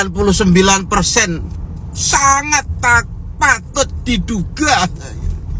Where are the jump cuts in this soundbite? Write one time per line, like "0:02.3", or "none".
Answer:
none